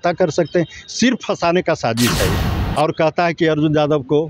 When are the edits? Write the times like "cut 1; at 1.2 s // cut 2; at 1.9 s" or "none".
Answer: none